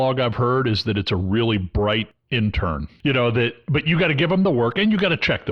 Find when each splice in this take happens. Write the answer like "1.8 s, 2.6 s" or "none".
2.4 s